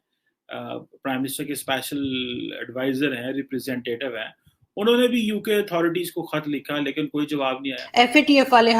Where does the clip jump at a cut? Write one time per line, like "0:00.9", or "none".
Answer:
0:07.7

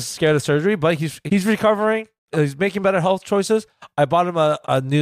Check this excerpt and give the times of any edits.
0:01.1

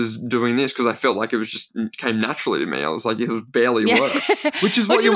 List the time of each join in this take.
none

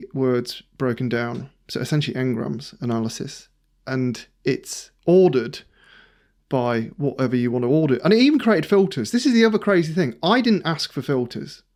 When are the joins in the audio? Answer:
none

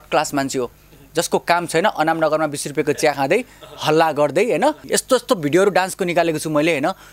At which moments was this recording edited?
0:04.8

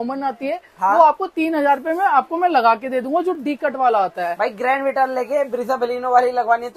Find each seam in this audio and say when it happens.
none

